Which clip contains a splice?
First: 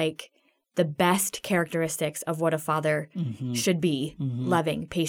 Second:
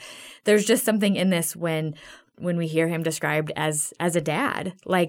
second; 1 cut; at 2.3 s

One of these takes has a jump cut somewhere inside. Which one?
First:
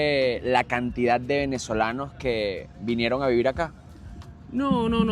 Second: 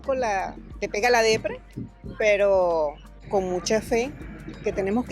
second; 1 cut; at 3.1 s

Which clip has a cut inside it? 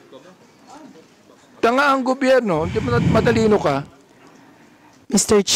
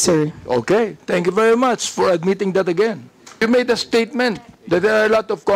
second; 1 cut; at 3.4 s

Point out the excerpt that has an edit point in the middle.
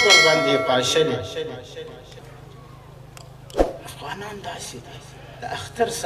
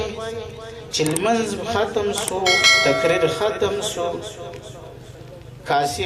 first; 1 cut; at 2.2 s

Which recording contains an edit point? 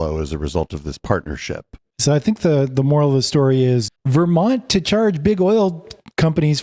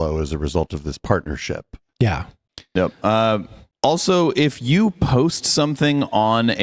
first; 2 cuts; at 1.8 s, 3.9 s

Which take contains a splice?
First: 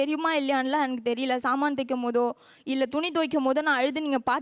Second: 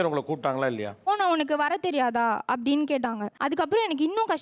second; 2 cuts; at 1.1 s, 3.3 s

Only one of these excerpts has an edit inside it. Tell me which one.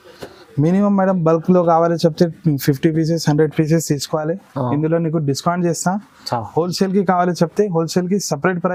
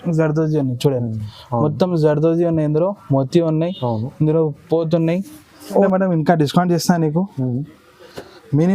second; 1 cut; at 5.9 s

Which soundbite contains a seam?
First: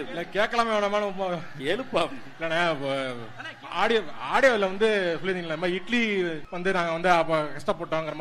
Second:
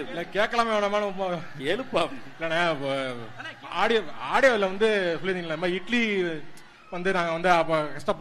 first; 1 cut; at 6.5 s

